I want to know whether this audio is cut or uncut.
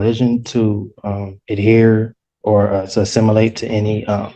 uncut